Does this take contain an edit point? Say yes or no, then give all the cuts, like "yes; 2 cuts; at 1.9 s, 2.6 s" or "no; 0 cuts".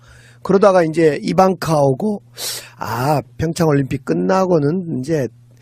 no; 0 cuts